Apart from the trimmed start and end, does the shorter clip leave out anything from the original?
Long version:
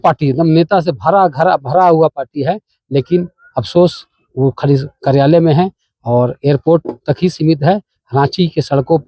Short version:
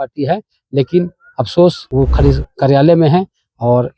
yes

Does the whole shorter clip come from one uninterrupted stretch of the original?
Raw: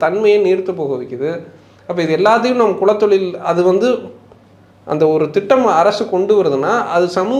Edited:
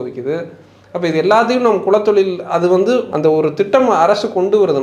no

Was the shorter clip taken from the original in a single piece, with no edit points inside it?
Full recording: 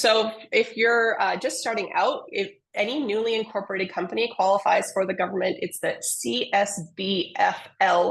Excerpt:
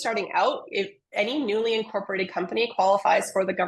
yes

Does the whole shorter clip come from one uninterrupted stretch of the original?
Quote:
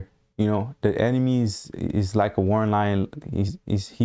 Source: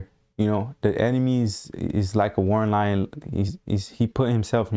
yes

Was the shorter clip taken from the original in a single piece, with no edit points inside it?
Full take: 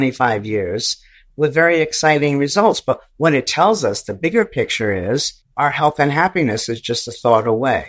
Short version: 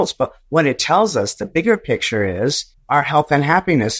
yes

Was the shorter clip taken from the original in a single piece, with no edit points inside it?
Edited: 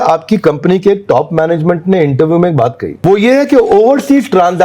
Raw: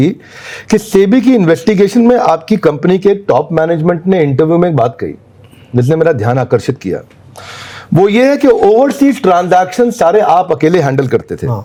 no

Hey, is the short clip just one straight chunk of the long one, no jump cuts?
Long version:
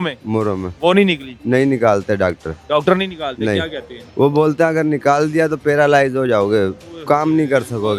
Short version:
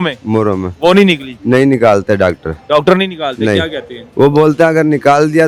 yes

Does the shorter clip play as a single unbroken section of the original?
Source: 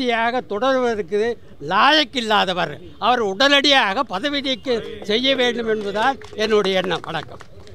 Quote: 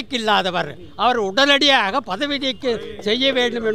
yes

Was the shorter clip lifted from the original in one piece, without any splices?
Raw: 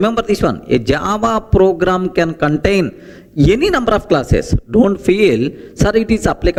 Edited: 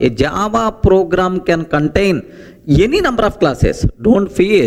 yes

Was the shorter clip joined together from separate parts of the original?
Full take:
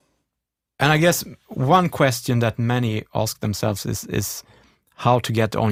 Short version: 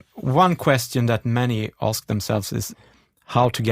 yes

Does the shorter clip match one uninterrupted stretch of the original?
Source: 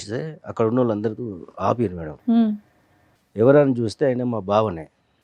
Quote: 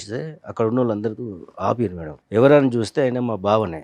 no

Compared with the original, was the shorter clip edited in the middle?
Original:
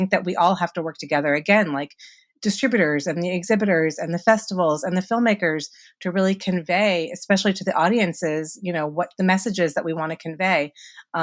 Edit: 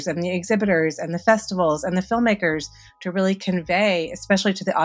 no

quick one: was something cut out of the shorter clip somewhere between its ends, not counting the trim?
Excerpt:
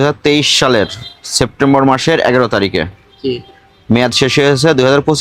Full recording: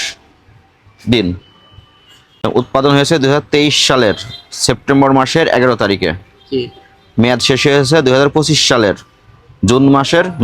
no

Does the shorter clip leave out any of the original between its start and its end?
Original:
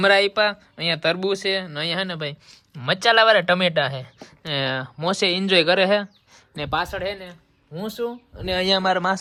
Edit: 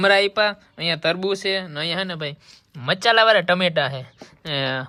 no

